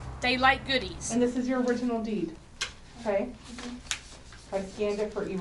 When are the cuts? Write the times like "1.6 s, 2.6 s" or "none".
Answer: 1.0 s